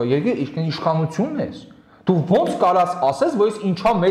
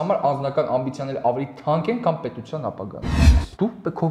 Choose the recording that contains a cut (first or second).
second